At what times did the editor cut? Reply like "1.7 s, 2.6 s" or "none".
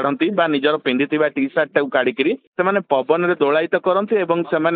2.5 s